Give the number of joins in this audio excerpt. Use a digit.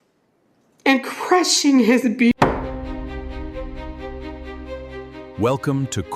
1